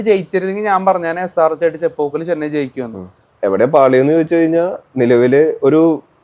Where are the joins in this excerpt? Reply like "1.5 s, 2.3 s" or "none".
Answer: 3.2 s

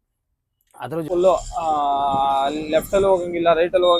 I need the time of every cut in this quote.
1.1 s

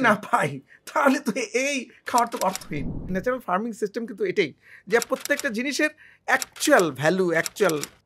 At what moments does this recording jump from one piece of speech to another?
3.1 s

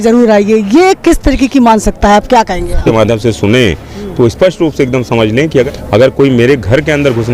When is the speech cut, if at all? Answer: 2.8 s, 5.6 s

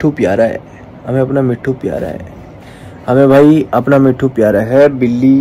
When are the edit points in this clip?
none

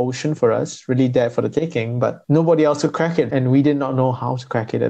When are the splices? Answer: 2.2 s, 3.3 s

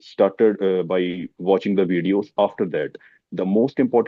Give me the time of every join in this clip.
1.3 s

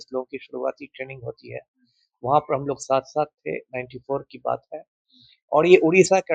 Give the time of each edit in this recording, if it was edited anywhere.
none

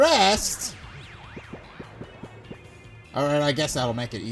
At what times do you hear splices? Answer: 1.2 s, 3.0 s

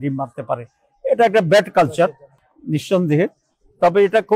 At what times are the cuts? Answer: none

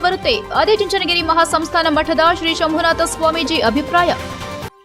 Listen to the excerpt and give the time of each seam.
none

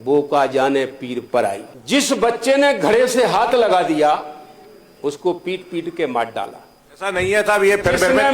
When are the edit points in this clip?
1.7 s

